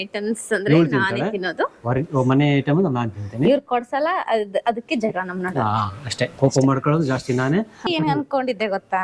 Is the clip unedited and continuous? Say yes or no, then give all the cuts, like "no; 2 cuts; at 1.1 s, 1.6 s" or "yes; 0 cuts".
no; 1 cut; at 7.9 s